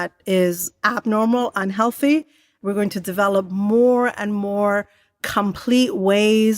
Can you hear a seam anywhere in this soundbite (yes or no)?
yes